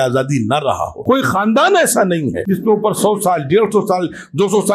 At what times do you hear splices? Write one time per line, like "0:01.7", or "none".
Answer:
0:00.9
0:02.4